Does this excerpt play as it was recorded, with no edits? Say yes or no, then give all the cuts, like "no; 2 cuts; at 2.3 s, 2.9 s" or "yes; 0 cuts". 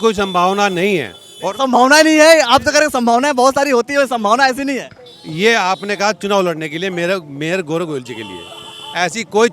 yes; 0 cuts